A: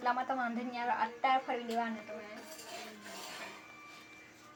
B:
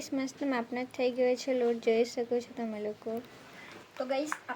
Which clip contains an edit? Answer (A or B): B